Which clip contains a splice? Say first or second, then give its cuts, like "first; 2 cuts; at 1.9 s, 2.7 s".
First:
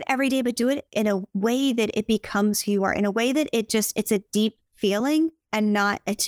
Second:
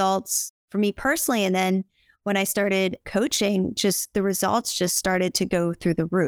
first; 2 cuts; at 1.1 s, 5.4 s